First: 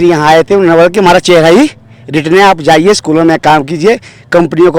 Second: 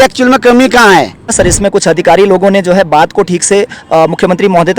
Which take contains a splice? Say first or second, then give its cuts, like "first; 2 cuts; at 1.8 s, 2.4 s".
second; 1 cut; at 1.3 s